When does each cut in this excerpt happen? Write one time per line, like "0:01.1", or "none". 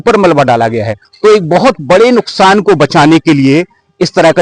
0:01.0